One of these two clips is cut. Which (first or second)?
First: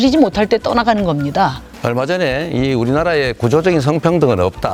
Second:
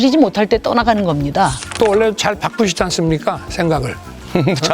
second